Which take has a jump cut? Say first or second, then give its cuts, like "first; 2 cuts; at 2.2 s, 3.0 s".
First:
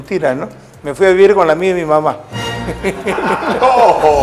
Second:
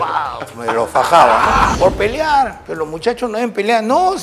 second; 2 cuts; at 1.8 s, 2.6 s